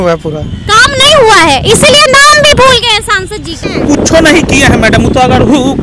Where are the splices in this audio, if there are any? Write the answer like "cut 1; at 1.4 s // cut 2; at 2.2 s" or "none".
cut 1; at 3.6 s